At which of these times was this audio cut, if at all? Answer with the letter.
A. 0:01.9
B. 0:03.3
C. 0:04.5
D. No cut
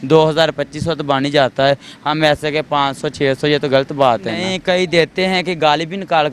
C